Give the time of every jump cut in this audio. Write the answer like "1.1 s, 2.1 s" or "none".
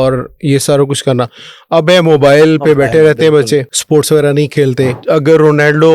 3.8 s, 5.0 s